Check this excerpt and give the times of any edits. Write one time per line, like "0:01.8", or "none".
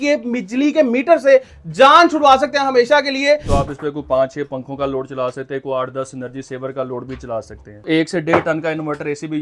0:03.5
0:07.9